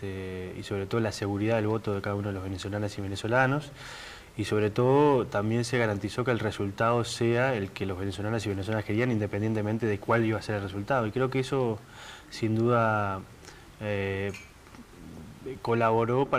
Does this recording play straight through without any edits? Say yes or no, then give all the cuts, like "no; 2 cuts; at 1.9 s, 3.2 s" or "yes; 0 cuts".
no; 1 cut; at 7.9 s